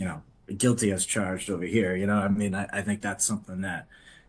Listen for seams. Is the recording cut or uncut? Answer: uncut